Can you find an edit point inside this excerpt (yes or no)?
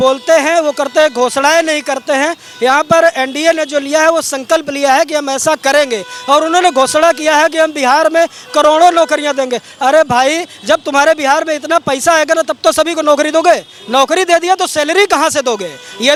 no